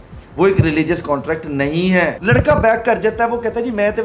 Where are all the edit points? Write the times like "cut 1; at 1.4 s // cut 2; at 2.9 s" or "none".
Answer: cut 1; at 2.2 s

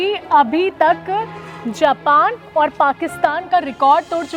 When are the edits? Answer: none

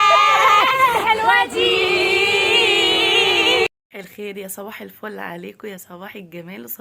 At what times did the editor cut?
cut 1; at 3.7 s

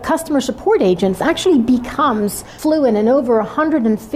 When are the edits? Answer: cut 1; at 1.2 s // cut 2; at 2.4 s

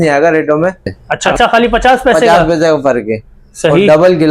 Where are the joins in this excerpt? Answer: cut 1; at 1.3 s

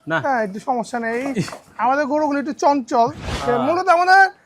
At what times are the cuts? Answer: cut 1; at 3.3 s

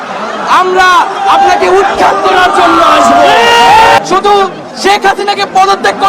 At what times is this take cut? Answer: cut 1; at 4.0 s

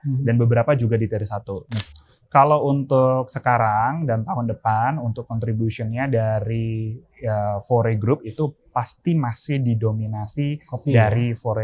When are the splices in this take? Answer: cut 1; at 1.7 s

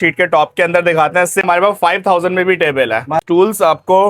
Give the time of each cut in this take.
cut 1; at 1.4 s // cut 2; at 3.2 s

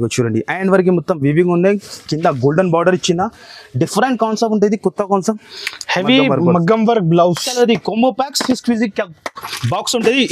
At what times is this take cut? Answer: cut 1; at 7.4 s

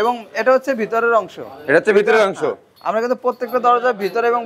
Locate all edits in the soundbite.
none

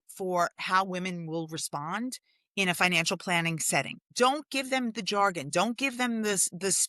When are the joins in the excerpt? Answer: cut 1; at 4.0 s

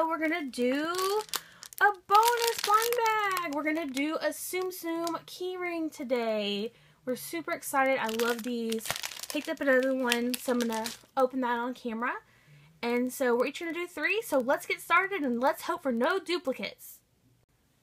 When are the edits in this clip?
cut 1; at 8.9 s

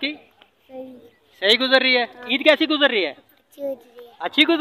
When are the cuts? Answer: cut 1; at 2.2 s

